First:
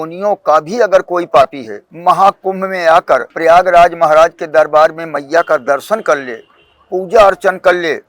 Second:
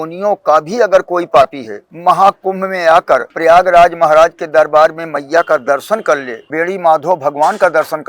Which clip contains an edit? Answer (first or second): second